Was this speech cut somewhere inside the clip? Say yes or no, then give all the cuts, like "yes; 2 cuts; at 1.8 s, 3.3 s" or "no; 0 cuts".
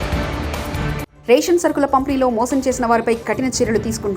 yes; 1 cut; at 1.1 s